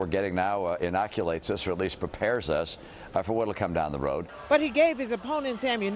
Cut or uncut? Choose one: cut